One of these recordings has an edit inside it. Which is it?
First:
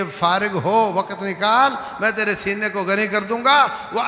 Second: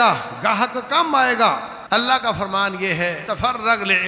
second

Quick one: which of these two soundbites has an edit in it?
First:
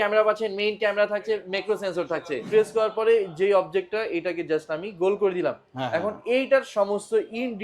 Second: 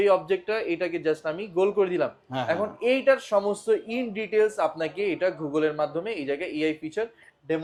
first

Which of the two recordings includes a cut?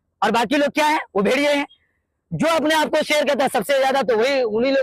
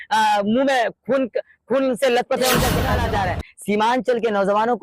second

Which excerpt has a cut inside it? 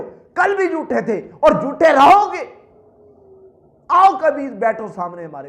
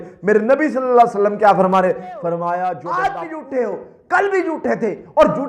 second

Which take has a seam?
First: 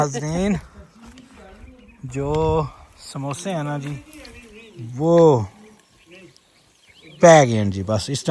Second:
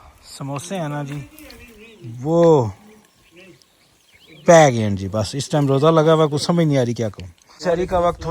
second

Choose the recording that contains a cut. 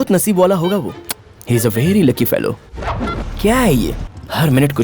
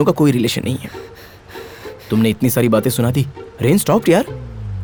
first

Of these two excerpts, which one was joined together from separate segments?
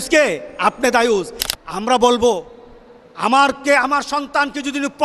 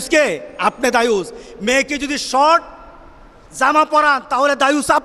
first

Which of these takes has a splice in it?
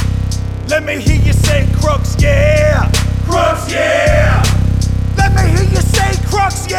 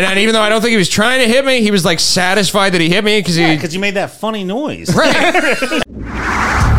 second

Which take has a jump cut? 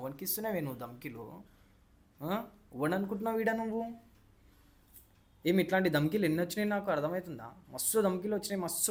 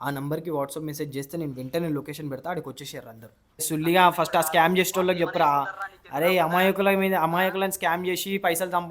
second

